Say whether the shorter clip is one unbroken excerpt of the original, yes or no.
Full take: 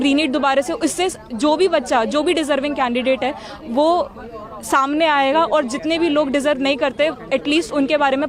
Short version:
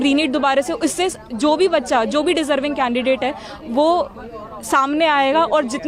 yes